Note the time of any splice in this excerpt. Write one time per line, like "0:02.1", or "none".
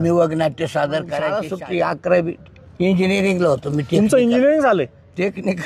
0:01.4